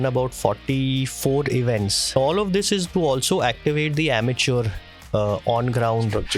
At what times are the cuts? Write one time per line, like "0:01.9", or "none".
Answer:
0:02.1